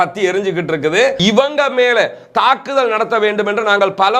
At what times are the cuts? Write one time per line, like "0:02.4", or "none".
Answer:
0:01.2